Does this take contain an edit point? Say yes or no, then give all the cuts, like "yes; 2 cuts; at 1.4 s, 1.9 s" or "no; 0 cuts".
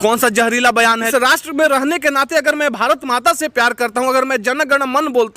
yes; 1 cut; at 1.1 s